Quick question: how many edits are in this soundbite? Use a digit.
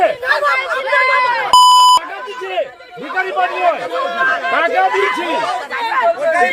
0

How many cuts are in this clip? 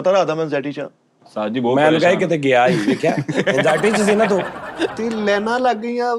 2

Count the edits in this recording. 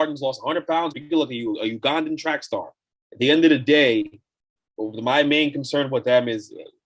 1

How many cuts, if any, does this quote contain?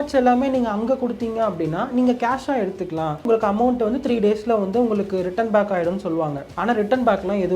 2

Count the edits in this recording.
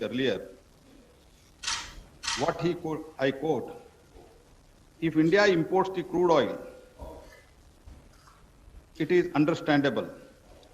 1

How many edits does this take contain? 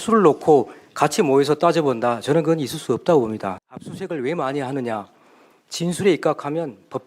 1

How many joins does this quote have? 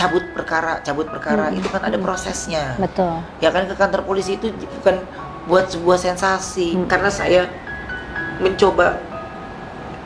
1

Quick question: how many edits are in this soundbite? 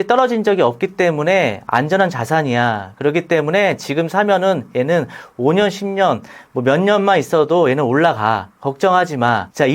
0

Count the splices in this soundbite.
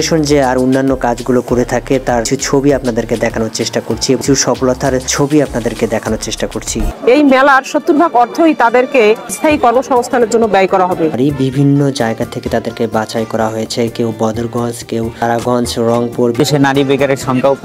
6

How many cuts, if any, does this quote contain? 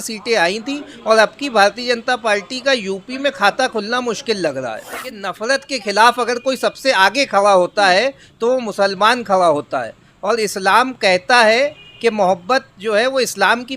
1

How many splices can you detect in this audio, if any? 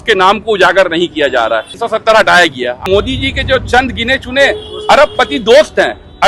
2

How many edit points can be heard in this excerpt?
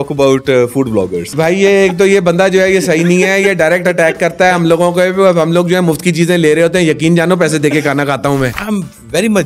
2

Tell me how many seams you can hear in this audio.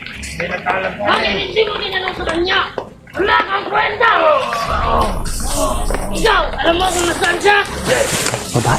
0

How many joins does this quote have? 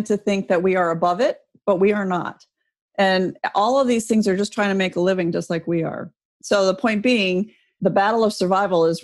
1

